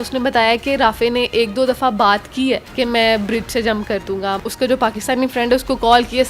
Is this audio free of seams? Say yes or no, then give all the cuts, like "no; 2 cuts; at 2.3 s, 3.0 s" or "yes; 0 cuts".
no; 2 cuts; at 2.7 s, 4.4 s